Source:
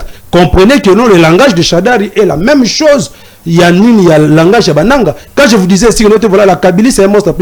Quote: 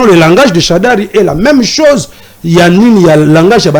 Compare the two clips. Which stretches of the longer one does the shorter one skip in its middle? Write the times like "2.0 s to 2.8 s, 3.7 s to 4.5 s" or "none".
none